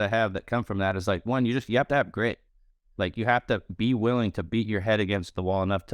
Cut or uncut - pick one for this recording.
uncut